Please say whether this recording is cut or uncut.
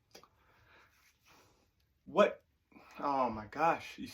cut